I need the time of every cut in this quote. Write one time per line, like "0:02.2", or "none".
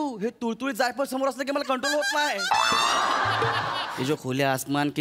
0:03.9